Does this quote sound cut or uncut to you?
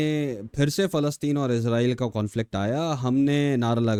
uncut